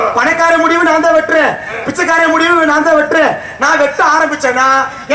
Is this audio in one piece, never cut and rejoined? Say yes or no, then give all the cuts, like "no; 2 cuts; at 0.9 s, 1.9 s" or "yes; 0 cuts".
yes; 0 cuts